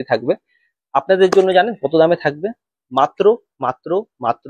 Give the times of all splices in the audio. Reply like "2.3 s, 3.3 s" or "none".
none